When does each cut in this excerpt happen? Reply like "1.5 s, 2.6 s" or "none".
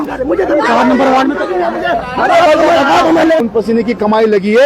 3.4 s